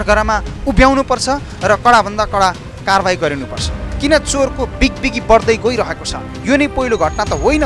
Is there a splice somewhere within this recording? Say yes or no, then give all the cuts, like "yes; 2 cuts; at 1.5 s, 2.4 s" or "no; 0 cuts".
no; 0 cuts